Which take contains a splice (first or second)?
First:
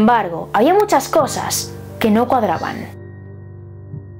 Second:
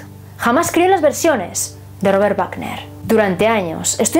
first